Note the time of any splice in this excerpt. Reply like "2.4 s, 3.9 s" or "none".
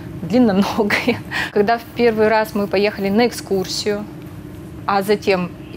1.5 s